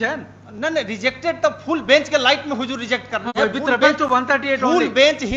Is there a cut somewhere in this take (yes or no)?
no